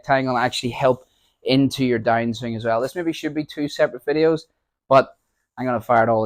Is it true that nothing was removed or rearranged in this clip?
yes; 0 cuts

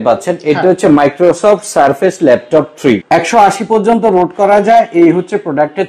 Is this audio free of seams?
no; 1 cut; at 3.0 s

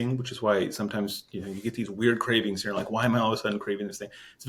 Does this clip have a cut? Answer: no; 0 cuts

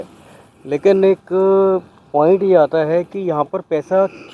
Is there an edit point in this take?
no; 0 cuts

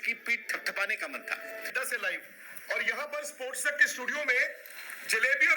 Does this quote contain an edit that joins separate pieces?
yes; 1 cut; at 1.7 s

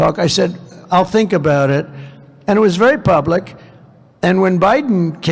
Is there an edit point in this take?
no; 0 cuts

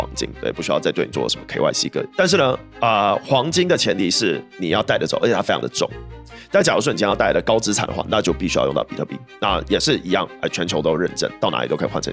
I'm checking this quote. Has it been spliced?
yes; 1 cut; at 2.1 s

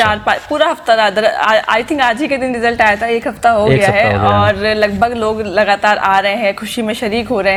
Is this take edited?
no; 0 cuts

